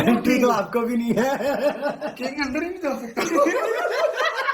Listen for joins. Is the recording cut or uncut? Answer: cut